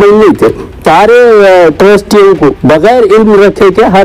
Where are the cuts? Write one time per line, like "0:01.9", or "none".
0:00.8
0:02.6